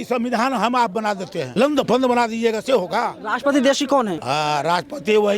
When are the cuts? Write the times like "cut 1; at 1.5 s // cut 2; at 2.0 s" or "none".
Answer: cut 1; at 1.4 s // cut 2; at 3.2 s // cut 3; at 4.2 s